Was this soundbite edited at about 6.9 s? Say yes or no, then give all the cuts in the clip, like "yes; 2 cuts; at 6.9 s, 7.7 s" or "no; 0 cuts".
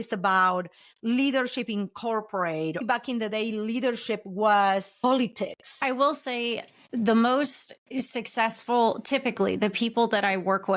no; 2 cuts; at 2.8 s, 5.7 s